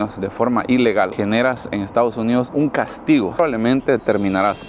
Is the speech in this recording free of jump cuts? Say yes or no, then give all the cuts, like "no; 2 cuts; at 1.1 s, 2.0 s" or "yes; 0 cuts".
no; 2 cuts; at 1.1 s, 3.3 s